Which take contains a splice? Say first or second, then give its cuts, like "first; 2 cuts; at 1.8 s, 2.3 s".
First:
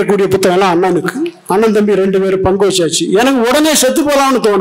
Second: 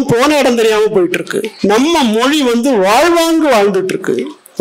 second; 1 cut; at 1.5 s